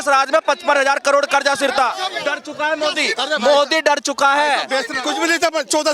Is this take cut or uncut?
cut